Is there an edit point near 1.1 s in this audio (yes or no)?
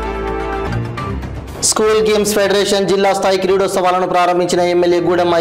yes